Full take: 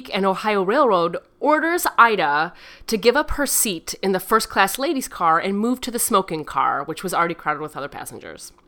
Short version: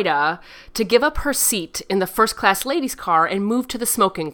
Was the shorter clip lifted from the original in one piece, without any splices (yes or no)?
yes